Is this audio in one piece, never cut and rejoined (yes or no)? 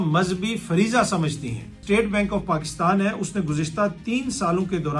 no